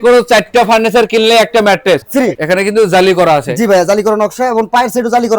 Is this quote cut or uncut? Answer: cut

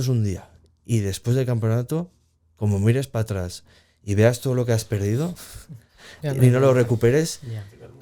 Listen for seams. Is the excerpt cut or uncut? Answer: uncut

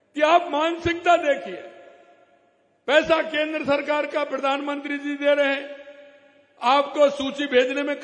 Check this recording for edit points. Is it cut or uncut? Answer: uncut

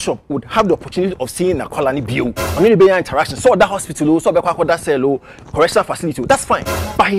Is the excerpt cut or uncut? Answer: cut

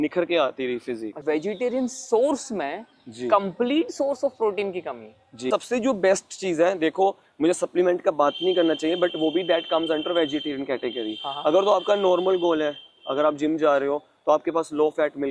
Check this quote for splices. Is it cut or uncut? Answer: cut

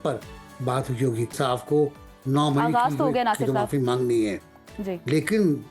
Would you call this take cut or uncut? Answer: cut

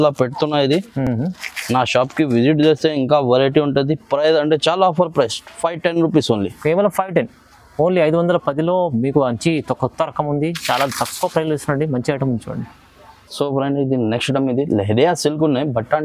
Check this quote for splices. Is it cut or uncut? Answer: uncut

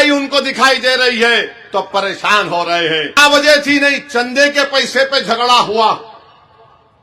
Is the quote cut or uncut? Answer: cut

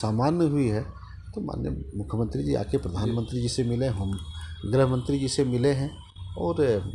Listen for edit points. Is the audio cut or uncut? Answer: uncut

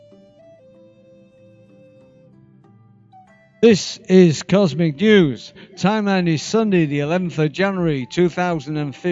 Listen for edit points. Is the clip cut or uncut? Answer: cut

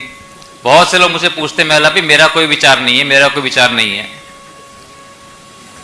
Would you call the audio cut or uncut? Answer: uncut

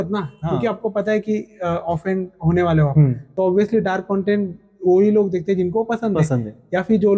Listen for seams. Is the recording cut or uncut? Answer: cut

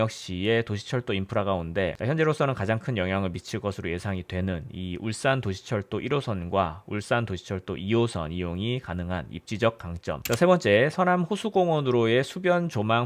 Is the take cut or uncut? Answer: cut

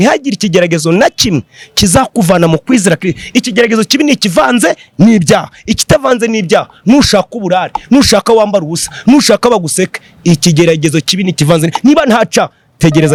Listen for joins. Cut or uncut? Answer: uncut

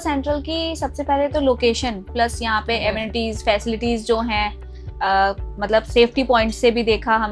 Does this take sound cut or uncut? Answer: cut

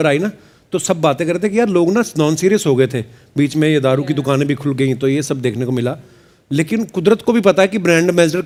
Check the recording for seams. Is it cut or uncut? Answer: uncut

